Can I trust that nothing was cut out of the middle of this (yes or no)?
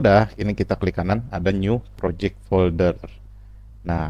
yes